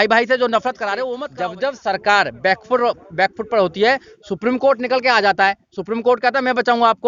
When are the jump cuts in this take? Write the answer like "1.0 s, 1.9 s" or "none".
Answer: 1.1 s